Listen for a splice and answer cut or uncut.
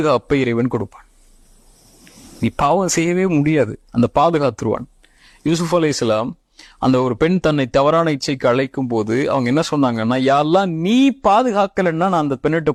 uncut